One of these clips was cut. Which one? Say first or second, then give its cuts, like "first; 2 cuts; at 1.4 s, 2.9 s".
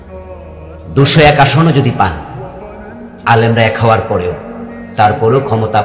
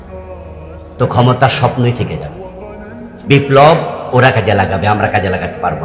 second; 1 cut; at 0.9 s